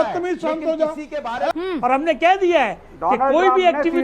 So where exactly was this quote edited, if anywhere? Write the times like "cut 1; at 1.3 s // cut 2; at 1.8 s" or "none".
cut 1; at 1.5 s